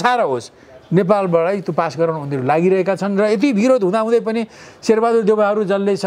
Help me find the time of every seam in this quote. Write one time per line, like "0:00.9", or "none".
none